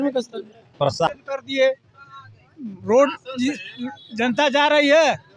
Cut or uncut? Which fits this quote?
cut